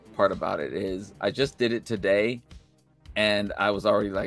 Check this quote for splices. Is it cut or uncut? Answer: uncut